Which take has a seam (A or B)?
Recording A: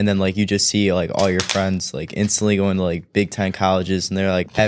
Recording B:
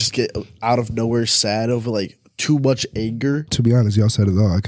B